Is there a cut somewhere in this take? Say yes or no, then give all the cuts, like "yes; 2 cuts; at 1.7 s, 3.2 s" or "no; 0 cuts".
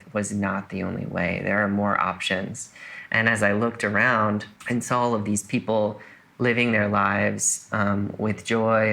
yes; 1 cut; at 4.5 s